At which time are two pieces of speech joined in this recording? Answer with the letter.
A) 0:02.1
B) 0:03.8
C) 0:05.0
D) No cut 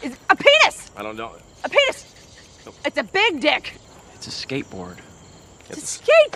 B